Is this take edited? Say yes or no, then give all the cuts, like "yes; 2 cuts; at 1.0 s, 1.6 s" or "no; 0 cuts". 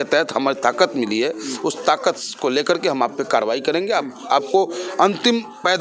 no; 0 cuts